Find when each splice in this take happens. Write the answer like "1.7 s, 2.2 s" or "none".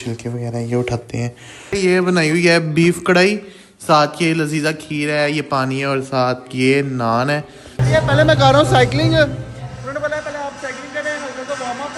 1.7 s, 7.8 s